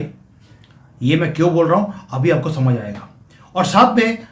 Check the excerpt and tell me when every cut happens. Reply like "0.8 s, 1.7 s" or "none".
none